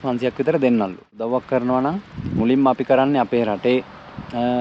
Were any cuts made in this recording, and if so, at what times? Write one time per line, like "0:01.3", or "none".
0:01.2